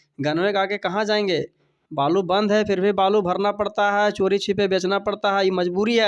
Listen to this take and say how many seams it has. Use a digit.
0